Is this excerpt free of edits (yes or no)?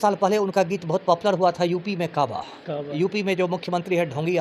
yes